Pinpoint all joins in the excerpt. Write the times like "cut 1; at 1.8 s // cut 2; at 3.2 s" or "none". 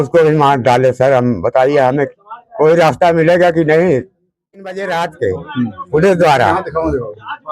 cut 1; at 4.7 s